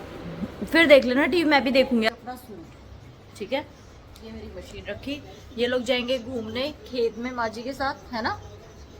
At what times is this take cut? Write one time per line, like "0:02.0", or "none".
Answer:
0:02.1